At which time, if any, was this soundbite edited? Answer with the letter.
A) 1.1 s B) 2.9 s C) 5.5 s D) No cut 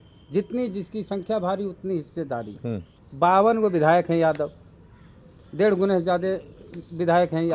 B